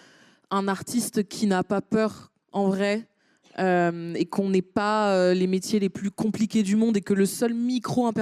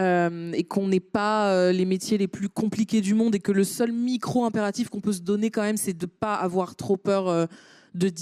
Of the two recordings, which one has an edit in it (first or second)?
second